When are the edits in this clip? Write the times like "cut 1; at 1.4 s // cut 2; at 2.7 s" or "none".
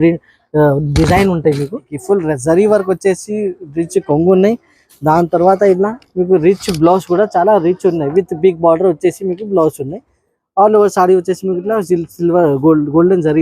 cut 1; at 1.9 s